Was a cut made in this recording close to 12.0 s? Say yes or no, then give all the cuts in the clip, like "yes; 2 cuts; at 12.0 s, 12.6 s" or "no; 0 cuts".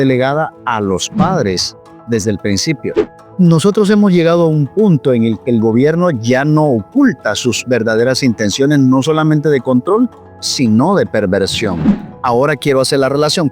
yes; 2 cuts; at 3.1 s, 12.0 s